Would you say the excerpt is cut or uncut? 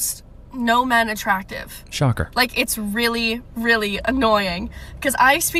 uncut